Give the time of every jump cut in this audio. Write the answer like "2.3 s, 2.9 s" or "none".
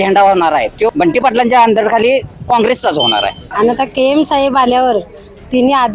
0.8 s, 3.4 s